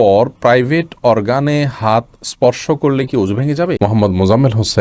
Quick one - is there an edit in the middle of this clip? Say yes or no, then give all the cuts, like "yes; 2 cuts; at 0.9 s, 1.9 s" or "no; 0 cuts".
yes; 1 cut; at 3.8 s